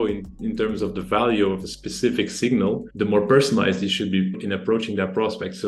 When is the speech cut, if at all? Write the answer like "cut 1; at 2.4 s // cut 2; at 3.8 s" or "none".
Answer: cut 1; at 2.9 s // cut 2; at 4.4 s